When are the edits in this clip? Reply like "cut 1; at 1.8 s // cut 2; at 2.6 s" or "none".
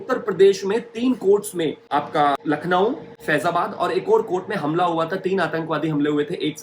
cut 1; at 2.4 s